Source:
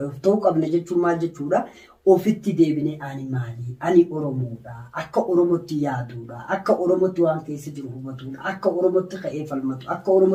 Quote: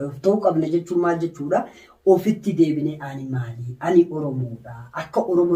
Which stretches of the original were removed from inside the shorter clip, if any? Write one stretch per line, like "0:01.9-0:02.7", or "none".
none